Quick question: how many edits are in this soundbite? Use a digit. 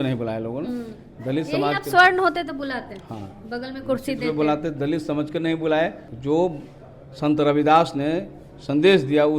1